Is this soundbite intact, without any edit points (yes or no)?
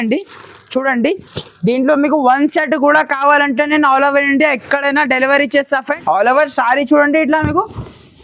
no